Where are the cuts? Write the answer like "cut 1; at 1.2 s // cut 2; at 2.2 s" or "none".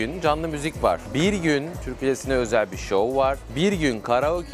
cut 1; at 1.0 s // cut 2; at 1.8 s